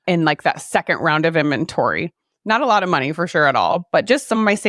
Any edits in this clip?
no; 0 cuts

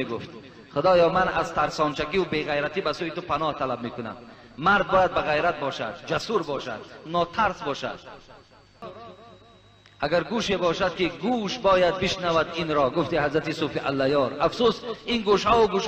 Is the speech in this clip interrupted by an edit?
yes; 1 cut; at 8.8 s

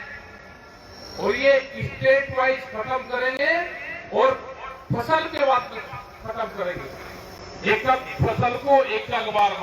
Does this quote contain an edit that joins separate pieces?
no; 0 cuts

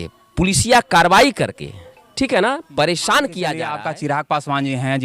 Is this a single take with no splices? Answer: no; 1 cut; at 3.7 s

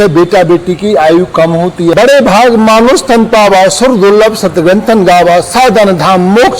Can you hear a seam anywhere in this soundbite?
yes; 1 cut; at 1.9 s

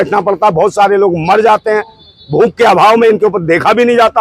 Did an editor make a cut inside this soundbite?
no; 0 cuts

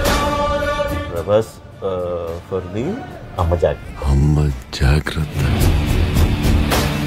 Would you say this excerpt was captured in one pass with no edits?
no; 1 cut; at 0.9 s

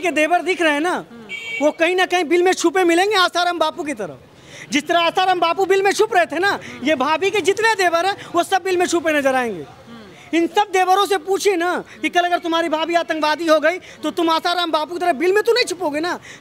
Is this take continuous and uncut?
yes; 0 cuts

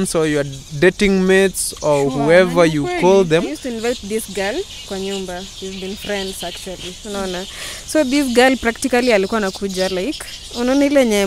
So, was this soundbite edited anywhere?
yes; 1 cut; at 3.6 s

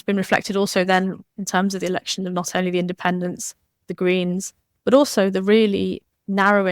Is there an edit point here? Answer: yes; 1 cut; at 1.3 s

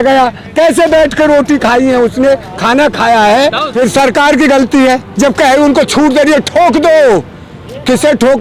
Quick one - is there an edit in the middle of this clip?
yes; 1 cut; at 3.6 s

